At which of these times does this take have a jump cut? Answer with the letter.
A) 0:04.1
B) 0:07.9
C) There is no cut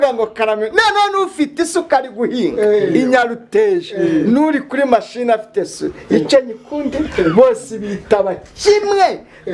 C